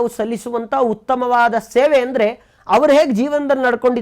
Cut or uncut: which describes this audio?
uncut